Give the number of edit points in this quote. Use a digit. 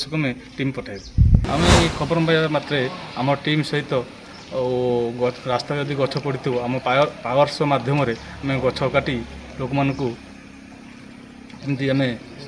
1